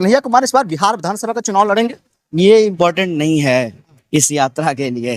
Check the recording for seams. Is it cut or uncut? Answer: uncut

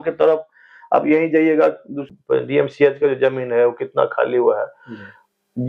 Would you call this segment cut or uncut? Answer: cut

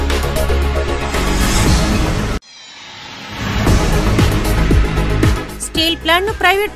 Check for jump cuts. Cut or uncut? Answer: cut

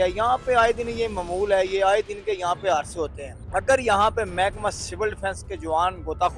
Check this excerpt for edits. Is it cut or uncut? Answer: uncut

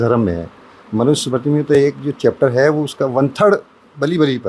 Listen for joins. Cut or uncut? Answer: uncut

